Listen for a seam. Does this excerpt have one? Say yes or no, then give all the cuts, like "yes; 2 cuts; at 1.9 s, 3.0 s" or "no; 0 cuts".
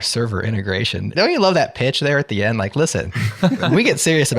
yes; 1 cut; at 1.1 s